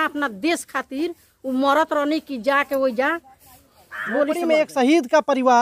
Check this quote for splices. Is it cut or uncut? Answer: cut